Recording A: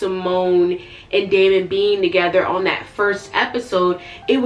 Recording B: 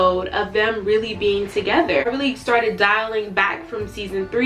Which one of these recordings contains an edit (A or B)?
B